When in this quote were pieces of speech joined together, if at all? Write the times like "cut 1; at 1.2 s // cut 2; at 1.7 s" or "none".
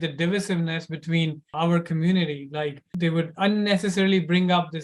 cut 1; at 1.5 s // cut 2; at 2.8 s